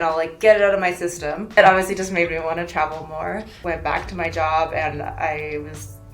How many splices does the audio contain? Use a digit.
2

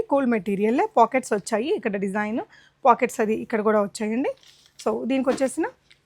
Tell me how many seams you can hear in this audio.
0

